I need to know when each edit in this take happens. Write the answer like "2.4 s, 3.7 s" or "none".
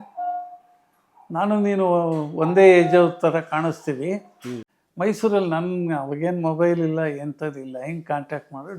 4.8 s